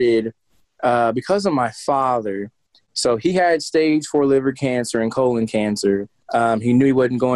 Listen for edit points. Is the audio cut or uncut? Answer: cut